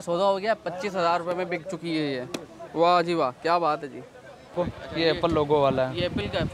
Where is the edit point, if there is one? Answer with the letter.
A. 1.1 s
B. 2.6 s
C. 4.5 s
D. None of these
C